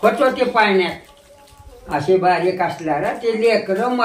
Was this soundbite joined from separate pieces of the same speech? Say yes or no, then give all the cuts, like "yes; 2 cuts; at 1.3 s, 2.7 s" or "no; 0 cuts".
no; 0 cuts